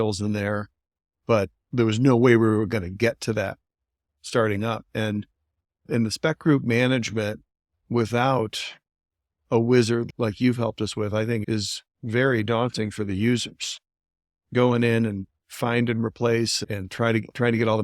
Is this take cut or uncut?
cut